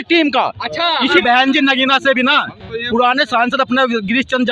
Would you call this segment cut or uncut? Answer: cut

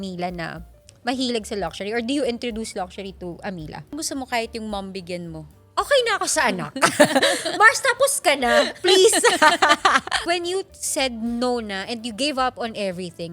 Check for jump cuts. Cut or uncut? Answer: cut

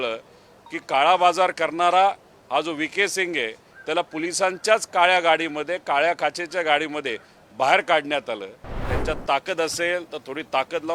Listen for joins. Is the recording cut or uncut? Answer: cut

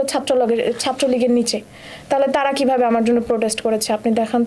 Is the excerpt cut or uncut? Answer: uncut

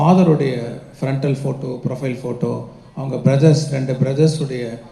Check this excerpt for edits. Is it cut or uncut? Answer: uncut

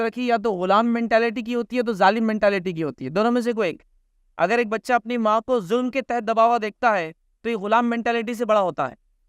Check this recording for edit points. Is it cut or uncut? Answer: uncut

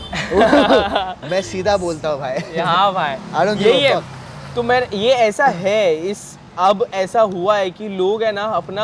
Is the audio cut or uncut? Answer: uncut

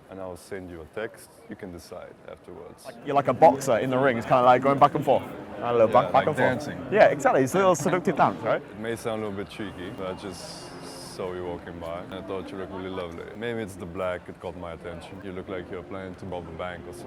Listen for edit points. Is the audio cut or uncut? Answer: cut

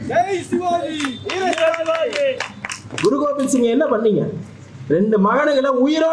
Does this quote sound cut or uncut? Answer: uncut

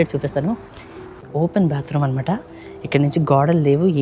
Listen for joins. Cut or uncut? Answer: cut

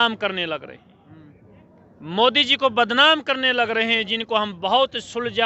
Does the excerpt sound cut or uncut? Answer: uncut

